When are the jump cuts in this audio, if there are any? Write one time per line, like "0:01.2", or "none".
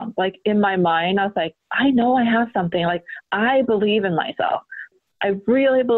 0:04.9